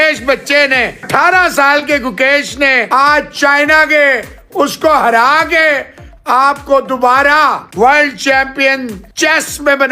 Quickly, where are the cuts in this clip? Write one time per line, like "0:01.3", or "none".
0:01.0
0:02.8
0:07.6
0:09.0